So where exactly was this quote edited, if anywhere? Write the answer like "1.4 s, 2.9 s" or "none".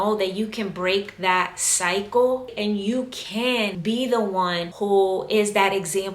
3.8 s, 4.7 s